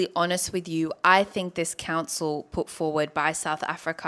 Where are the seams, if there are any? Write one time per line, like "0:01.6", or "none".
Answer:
none